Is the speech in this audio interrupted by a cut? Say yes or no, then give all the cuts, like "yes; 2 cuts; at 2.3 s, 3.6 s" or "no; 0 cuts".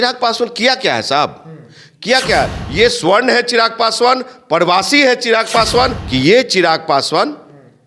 yes; 2 cuts; at 2.6 s, 6.0 s